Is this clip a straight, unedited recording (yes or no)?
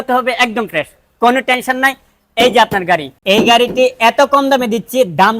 no